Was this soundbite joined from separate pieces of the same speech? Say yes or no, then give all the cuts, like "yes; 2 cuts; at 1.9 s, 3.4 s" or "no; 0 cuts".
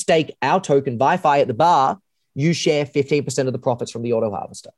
no; 0 cuts